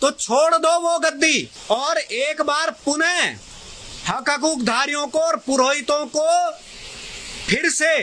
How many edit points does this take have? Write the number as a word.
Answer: one